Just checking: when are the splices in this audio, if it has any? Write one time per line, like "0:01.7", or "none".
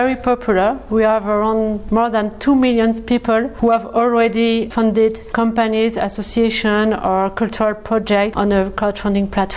0:01.8
0:03.5
0:05.2
0:08.3